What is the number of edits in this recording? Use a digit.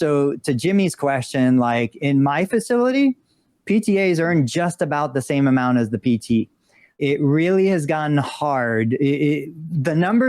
1